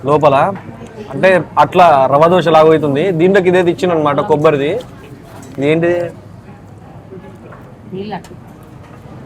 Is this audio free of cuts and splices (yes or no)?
yes